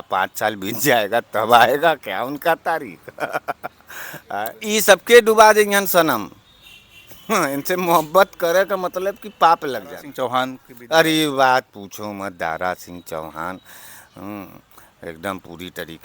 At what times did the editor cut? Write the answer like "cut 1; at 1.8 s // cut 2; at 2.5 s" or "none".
cut 1; at 4.5 s // cut 2; at 10.0 s